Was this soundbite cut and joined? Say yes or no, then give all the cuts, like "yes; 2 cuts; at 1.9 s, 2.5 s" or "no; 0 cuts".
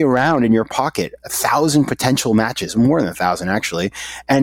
no; 0 cuts